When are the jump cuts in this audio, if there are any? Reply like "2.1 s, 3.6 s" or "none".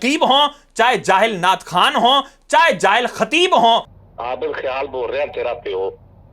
3.8 s